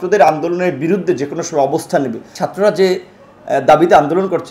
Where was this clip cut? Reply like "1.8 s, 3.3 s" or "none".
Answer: 2.4 s